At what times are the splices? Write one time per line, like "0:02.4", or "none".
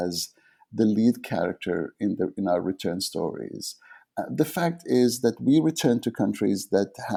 none